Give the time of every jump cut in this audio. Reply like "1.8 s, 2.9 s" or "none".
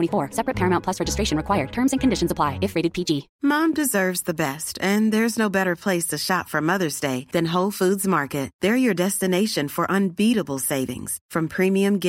3.3 s